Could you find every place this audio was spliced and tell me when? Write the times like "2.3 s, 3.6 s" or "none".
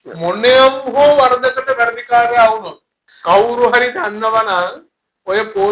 3.0 s